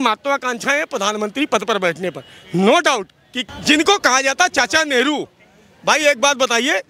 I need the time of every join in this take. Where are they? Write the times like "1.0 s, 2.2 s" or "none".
3.3 s

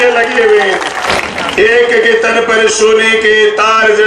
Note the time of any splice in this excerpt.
1.0 s

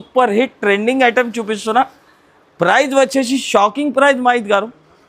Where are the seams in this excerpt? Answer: none

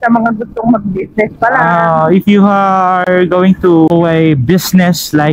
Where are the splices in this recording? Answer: 3.9 s

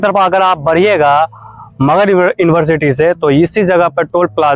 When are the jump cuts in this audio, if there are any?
none

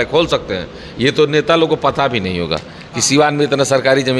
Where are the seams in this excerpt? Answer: none

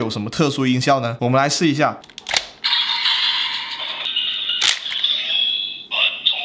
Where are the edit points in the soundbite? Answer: 1.1 s, 2.1 s, 4.0 s

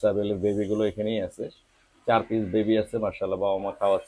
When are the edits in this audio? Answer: none

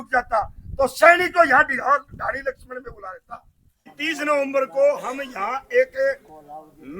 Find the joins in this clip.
3.9 s

